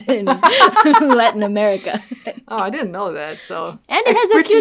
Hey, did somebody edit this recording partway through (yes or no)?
no